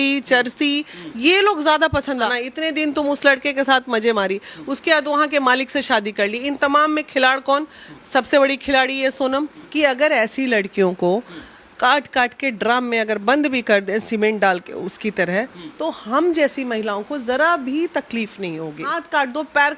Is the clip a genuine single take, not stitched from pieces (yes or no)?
no